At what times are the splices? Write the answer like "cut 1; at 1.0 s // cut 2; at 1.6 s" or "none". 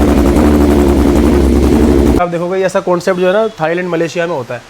cut 1; at 2.2 s